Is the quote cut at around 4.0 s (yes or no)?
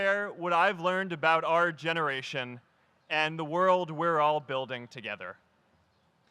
yes